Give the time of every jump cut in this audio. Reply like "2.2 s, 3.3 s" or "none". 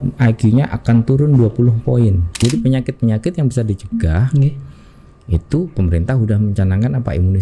2.3 s